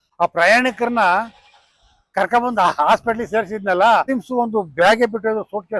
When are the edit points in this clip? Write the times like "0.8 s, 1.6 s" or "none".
4.1 s